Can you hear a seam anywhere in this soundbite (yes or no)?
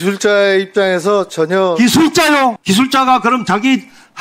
yes